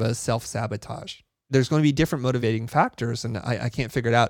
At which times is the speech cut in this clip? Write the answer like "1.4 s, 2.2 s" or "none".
1.5 s, 2.4 s